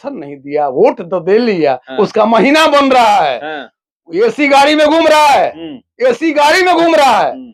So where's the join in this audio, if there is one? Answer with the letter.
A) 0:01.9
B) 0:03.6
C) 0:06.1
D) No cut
D